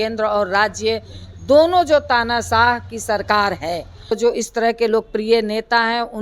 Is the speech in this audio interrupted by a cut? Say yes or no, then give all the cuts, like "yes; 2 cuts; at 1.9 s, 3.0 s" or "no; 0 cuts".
yes; 1 cut; at 4.1 s